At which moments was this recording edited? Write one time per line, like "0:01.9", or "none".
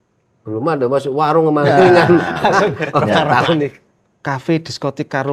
0:03.7